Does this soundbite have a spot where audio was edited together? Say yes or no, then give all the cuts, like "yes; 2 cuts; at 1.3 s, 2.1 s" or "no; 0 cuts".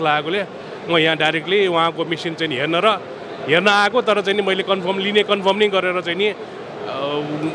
no; 0 cuts